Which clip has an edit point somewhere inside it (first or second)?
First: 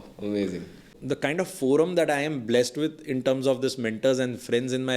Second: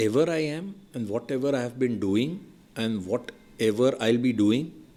first